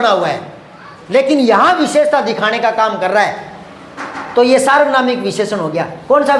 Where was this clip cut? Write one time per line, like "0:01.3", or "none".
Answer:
none